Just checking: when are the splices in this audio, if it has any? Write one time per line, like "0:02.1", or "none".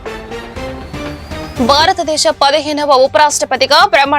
none